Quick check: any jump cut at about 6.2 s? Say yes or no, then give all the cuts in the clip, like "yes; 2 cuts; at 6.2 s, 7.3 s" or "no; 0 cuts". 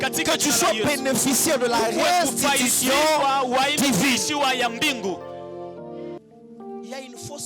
yes; 1 cut; at 6.2 s